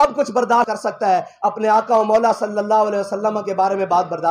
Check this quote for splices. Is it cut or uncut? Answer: uncut